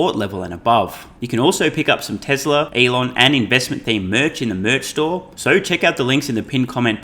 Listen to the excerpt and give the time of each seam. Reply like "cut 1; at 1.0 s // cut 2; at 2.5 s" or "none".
cut 1; at 1.1 s // cut 2; at 2.7 s // cut 3; at 5.3 s